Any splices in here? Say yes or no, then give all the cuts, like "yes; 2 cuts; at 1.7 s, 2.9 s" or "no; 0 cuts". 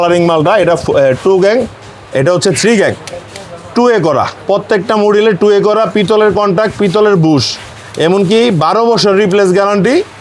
no; 0 cuts